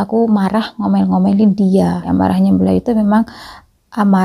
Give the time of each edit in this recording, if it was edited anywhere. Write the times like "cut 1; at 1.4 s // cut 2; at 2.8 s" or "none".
cut 1; at 2.1 s

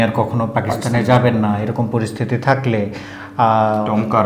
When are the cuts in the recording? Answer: none

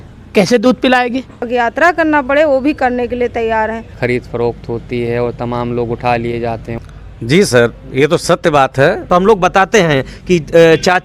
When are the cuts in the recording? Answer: cut 1; at 1.4 s // cut 2; at 3.9 s // cut 3; at 6.8 s // cut 4; at 9.0 s

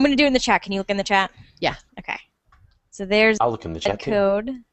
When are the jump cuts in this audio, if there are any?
cut 1; at 0.9 s

